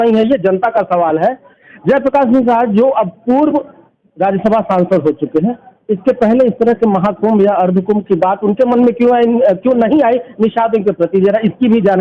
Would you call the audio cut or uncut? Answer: uncut